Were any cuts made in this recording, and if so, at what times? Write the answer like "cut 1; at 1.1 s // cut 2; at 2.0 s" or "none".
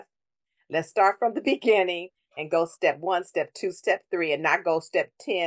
none